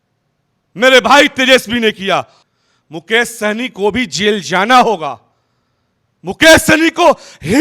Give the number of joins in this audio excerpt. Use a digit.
1